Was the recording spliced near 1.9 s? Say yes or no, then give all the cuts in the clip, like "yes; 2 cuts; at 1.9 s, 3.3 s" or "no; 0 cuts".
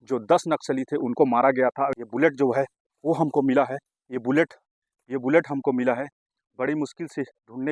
yes; 1 cut; at 1.9 s